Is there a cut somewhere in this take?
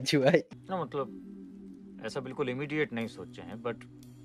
no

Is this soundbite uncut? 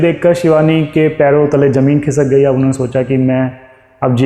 yes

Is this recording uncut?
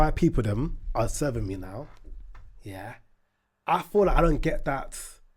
yes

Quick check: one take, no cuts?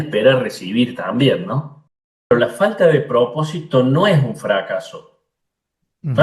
no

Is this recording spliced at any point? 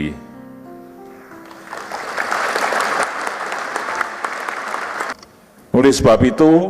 yes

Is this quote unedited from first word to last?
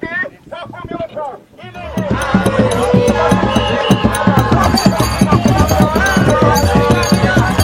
yes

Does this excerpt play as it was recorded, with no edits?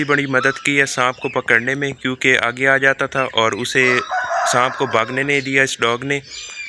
yes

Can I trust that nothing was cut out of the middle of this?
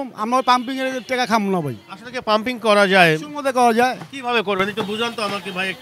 yes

